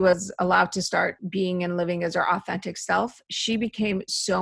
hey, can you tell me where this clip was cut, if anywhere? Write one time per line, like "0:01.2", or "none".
0:01.2